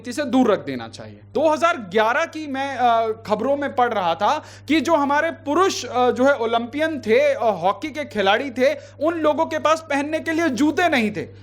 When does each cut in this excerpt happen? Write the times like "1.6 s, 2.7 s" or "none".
1.3 s

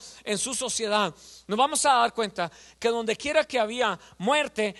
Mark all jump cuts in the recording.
none

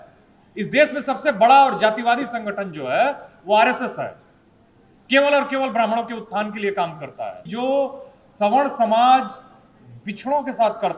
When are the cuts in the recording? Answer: 7.5 s

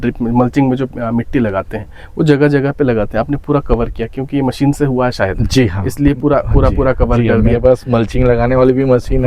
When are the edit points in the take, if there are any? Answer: none

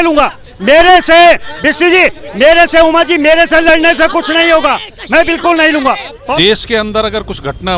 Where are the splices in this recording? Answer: 6.4 s

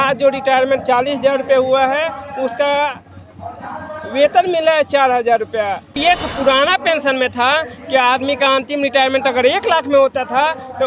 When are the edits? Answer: 5.9 s

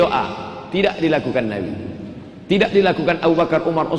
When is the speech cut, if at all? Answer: none

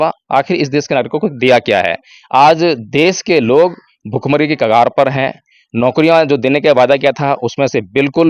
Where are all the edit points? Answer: none

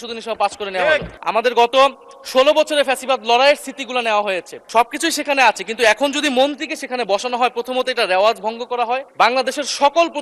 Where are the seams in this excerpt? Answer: 1.1 s, 4.5 s, 9.1 s

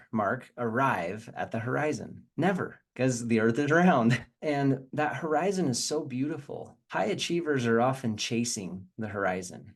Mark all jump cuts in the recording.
none

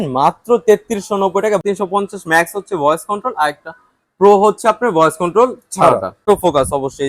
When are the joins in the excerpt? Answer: 1.6 s, 6.3 s

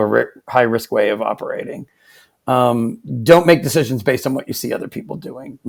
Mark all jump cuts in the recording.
none

